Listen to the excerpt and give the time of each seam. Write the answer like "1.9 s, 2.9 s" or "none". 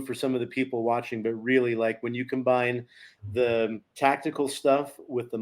3.8 s